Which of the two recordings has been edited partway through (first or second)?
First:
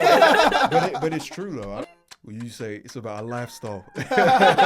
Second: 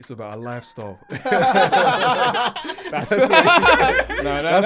first